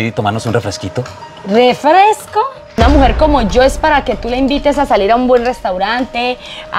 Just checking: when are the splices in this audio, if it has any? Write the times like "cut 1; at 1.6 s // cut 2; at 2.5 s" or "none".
cut 1; at 2.6 s